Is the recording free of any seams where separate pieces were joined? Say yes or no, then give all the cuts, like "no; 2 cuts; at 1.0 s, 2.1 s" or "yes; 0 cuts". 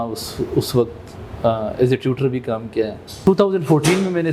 no; 1 cut; at 3.0 s